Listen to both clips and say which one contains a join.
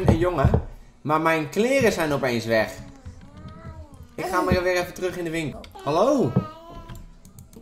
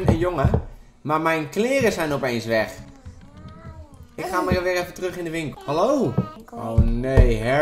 second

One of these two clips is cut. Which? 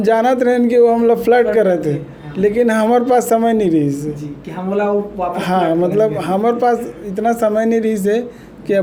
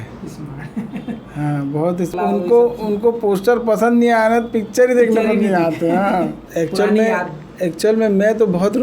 second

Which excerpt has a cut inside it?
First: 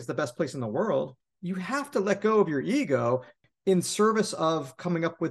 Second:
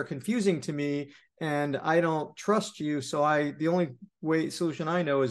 first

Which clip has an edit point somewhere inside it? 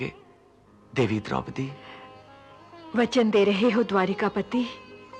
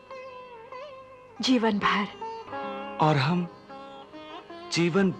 second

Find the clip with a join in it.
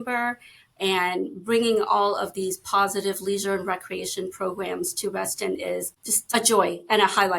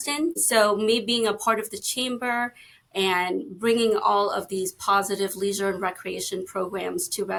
first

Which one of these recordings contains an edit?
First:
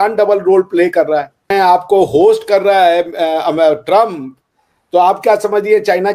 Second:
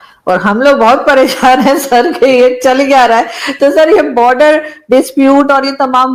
first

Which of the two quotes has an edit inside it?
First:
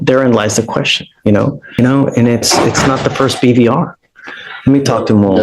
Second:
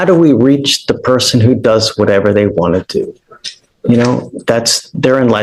first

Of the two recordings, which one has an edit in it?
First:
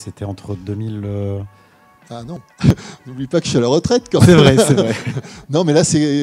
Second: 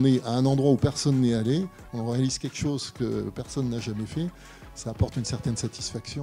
first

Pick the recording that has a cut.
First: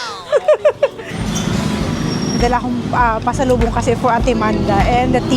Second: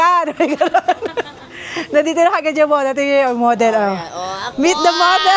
first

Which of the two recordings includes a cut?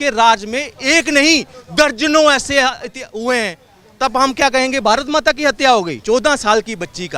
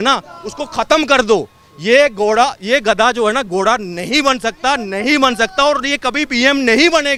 first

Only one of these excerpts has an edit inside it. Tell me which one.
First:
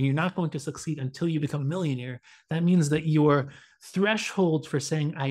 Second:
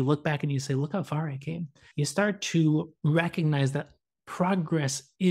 second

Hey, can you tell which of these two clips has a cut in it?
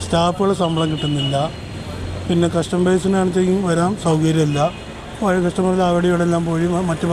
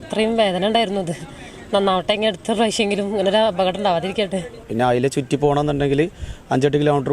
second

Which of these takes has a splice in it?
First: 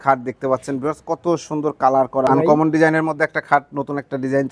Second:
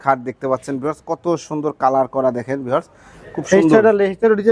first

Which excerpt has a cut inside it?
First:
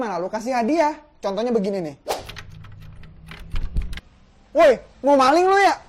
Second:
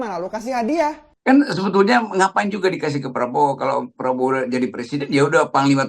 second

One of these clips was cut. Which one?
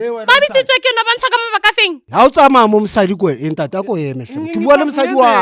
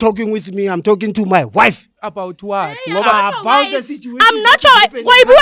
first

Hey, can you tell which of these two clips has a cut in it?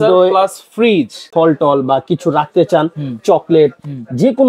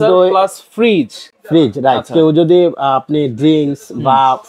first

